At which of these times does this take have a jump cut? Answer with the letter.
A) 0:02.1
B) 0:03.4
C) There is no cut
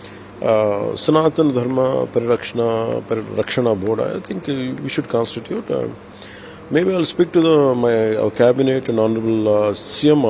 C